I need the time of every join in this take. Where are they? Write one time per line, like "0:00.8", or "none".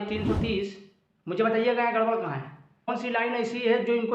0:02.9